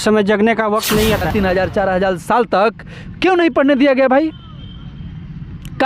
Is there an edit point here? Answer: yes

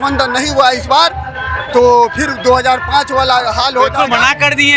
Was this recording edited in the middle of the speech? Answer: no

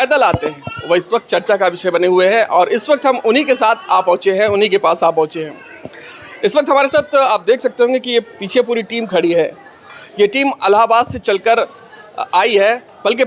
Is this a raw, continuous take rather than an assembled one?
yes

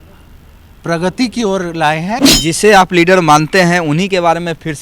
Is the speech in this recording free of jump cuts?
no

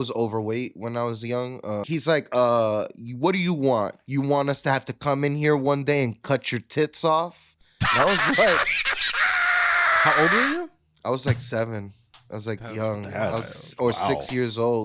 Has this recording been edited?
yes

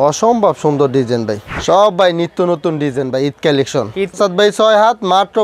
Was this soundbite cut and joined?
yes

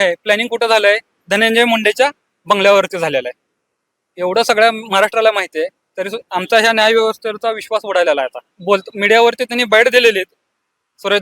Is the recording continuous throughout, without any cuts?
no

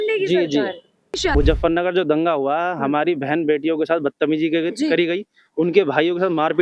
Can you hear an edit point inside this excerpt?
yes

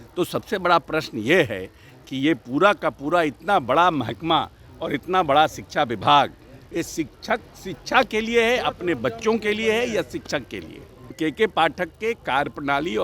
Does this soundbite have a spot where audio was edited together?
yes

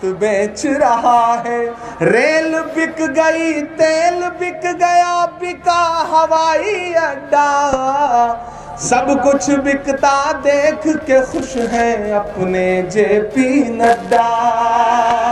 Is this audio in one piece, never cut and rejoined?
no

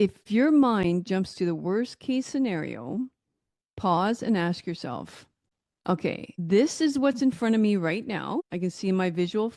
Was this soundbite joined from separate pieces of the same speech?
no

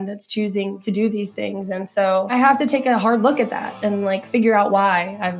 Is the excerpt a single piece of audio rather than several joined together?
no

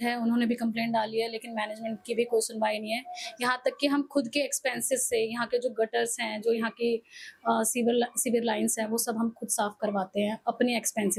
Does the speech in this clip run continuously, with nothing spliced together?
yes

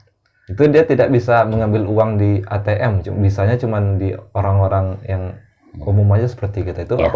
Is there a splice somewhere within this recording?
no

